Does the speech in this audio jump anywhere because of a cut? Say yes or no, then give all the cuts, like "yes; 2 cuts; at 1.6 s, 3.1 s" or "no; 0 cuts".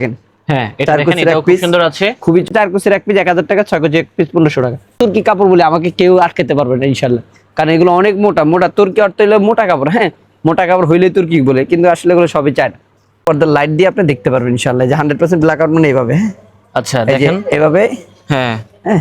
yes; 3 cuts; at 2.5 s, 5.0 s, 13.2 s